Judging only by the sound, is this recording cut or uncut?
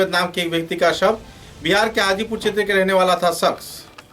uncut